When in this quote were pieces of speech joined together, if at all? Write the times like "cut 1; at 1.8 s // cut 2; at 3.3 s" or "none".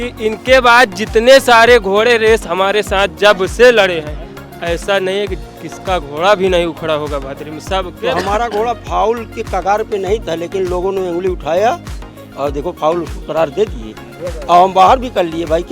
cut 1; at 7.9 s